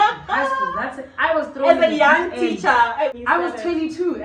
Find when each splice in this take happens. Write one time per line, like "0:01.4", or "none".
0:03.1